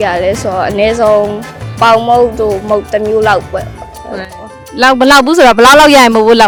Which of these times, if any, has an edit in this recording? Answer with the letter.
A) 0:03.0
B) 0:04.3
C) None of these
C